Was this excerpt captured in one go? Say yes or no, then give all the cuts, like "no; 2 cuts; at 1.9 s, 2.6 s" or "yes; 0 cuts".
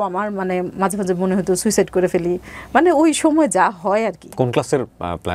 yes; 0 cuts